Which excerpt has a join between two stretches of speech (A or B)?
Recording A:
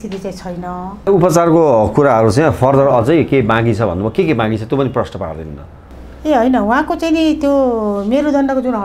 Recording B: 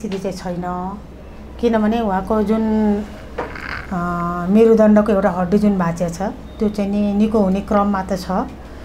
A